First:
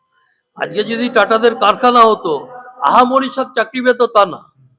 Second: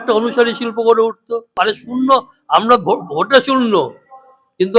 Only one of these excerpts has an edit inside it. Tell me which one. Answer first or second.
second